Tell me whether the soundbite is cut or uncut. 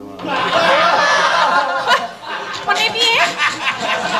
uncut